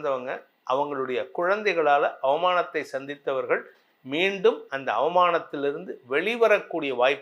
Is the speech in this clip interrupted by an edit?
no; 0 cuts

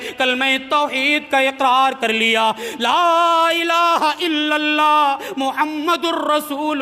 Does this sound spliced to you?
no; 0 cuts

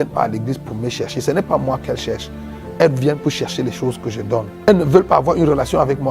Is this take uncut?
no; 1 cut; at 4.7 s

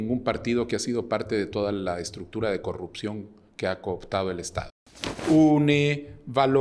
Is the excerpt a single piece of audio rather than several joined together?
yes; 0 cuts

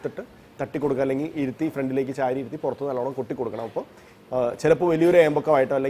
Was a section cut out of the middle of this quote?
no; 0 cuts

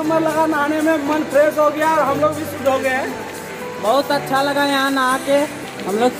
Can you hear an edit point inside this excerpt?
no; 0 cuts

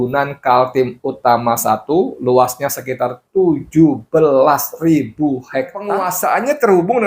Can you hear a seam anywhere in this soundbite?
yes; 1 cut; at 6.1 s

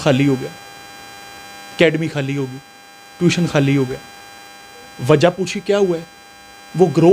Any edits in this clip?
no; 0 cuts

